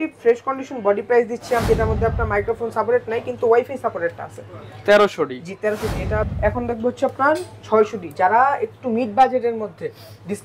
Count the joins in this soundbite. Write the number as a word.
two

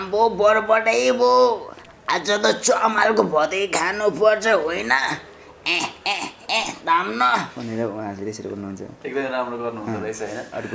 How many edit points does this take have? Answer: zero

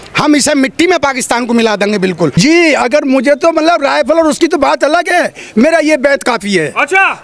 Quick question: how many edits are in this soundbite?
one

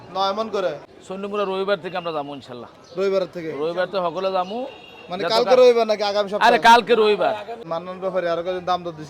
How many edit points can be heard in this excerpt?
two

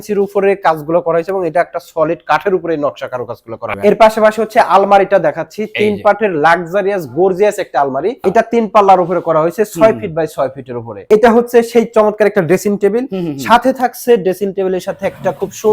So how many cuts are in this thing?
three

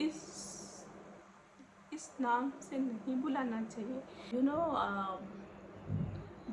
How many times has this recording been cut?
one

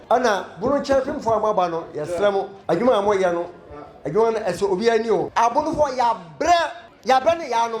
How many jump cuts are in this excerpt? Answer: three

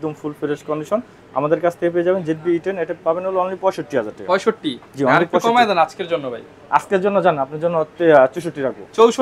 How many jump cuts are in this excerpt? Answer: zero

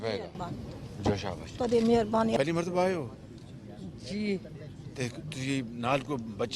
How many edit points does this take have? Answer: one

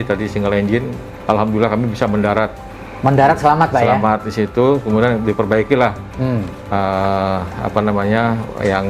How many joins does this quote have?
zero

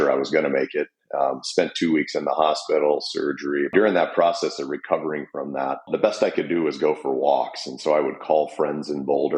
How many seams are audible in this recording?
two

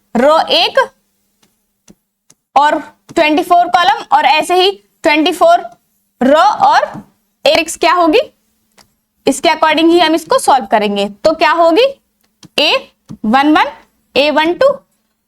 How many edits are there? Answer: one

